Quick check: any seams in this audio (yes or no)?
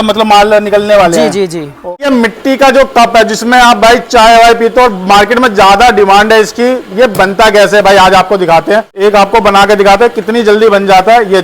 yes